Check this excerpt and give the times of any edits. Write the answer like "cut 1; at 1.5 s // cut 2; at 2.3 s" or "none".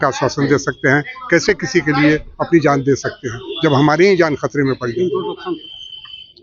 none